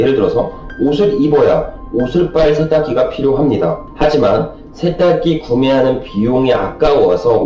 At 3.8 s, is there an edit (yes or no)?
yes